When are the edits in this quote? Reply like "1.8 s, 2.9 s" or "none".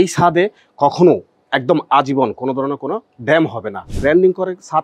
3.8 s

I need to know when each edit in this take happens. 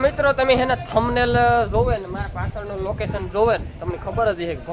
none

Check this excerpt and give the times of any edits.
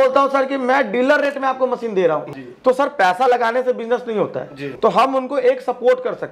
2.4 s, 4.6 s

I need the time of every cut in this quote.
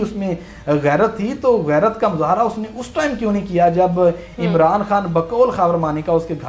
none

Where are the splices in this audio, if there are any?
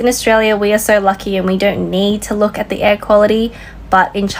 none

